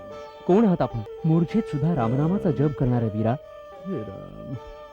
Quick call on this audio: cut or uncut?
cut